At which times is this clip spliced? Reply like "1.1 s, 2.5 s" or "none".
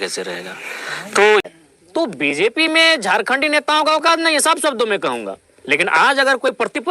1.4 s